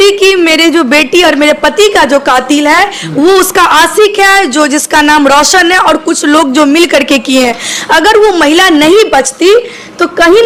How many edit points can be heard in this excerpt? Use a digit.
0